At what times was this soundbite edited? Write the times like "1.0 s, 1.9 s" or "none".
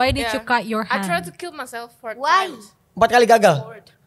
none